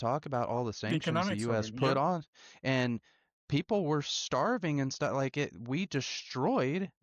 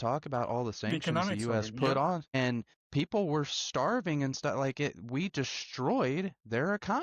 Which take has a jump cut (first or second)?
second